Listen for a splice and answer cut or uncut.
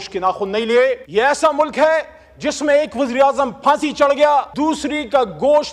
cut